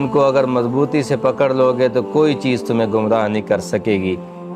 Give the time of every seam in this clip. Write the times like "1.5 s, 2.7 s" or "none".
none